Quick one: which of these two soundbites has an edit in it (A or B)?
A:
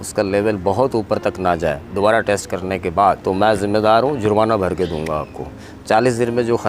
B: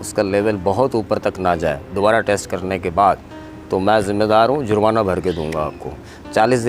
A